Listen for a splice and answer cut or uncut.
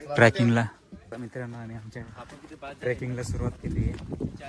cut